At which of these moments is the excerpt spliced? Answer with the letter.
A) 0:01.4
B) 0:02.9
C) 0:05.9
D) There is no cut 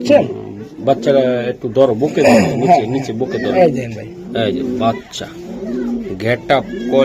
D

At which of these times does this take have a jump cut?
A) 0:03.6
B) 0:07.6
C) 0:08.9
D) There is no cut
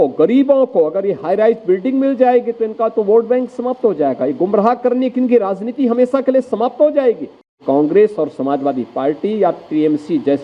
B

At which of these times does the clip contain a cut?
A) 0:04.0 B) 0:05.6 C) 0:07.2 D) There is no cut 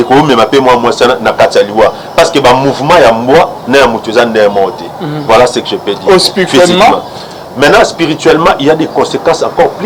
D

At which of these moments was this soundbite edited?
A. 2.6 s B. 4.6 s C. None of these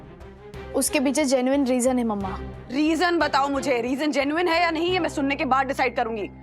C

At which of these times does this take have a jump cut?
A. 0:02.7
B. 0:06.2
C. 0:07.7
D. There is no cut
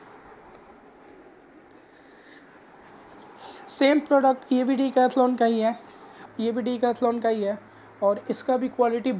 B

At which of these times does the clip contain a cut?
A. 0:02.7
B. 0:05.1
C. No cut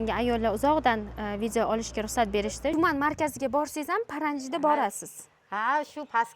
A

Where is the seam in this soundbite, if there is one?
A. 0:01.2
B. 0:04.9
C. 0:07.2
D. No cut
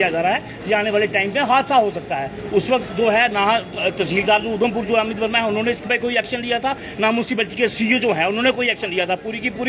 D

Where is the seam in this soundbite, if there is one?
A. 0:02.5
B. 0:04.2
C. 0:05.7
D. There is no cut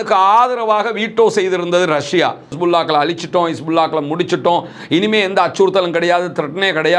A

